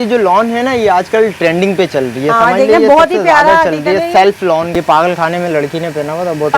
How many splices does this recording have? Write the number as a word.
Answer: one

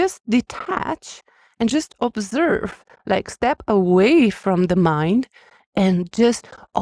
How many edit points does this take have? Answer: zero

